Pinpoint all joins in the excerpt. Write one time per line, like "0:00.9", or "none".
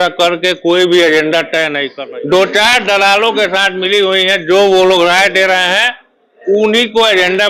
0:01.8